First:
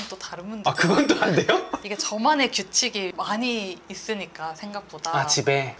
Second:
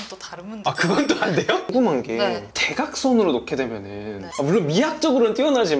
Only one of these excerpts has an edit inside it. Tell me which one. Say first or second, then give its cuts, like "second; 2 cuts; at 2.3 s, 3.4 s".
second; 1 cut; at 1.7 s